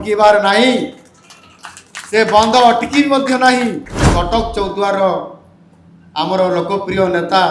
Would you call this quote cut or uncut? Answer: cut